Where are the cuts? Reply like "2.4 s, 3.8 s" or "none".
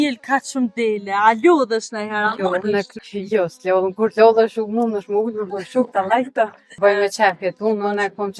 2.9 s, 6.8 s